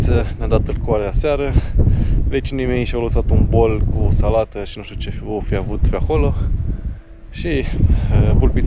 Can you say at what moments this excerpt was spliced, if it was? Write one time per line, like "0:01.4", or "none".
none

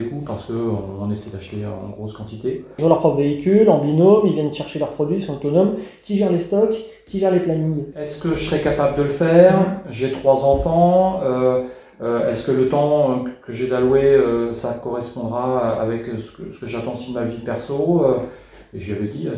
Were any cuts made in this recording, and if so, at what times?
0:02.8
0:08.3

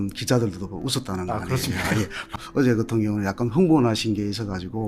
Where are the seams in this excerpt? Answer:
0:02.3

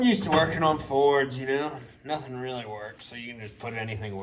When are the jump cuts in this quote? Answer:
none

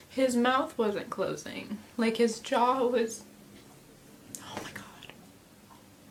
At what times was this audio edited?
none

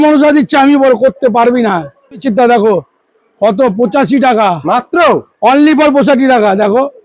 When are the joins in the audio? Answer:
0:02.2

